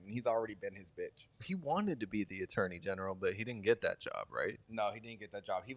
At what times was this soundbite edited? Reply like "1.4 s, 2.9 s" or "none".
1.4 s